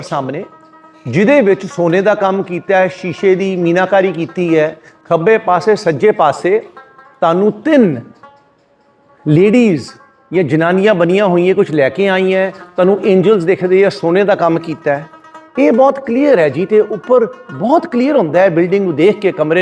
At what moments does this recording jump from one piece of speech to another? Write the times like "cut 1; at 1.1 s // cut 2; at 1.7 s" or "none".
cut 1; at 4.9 s

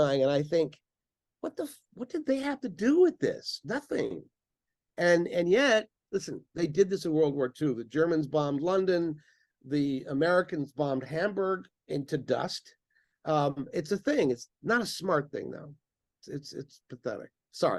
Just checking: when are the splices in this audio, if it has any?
none

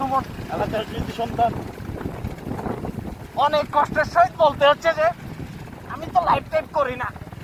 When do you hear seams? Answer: none

